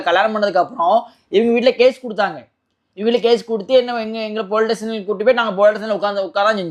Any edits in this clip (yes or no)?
no